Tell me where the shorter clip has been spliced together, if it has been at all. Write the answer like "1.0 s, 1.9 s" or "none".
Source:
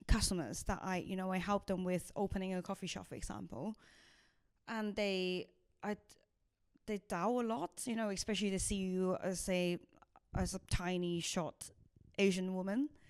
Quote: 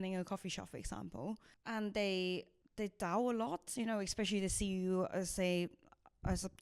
1.5 s, 2.6 s